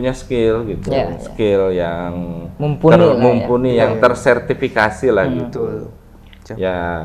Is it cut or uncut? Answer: uncut